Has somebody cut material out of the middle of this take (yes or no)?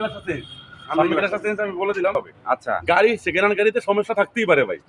yes